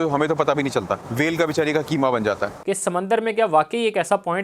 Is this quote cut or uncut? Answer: cut